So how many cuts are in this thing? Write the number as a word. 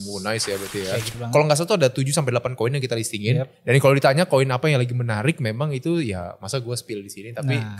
one